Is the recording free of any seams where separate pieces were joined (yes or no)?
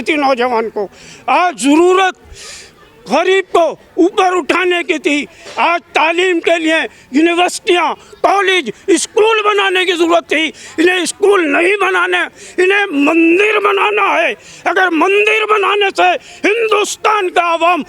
yes